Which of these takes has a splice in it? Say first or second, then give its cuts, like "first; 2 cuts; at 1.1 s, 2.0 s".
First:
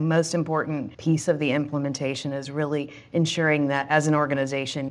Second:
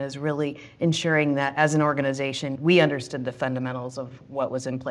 first; 1 cut; at 0.9 s